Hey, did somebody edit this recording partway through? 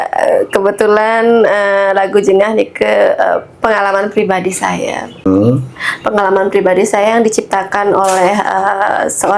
yes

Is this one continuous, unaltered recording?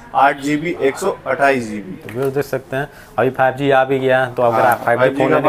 yes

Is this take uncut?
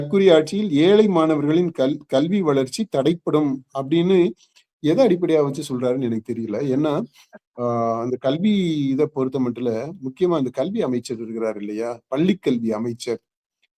yes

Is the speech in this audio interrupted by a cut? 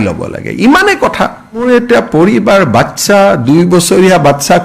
yes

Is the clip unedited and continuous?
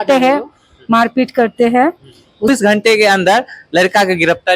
no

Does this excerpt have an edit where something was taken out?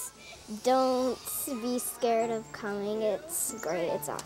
no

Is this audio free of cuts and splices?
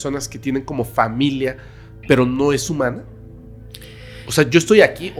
yes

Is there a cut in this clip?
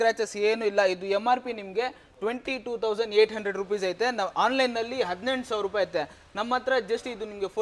no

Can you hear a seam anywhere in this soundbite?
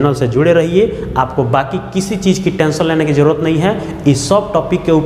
no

